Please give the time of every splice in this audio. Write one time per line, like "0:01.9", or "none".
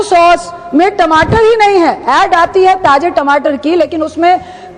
none